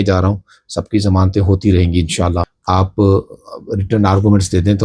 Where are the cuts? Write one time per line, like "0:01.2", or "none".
0:02.5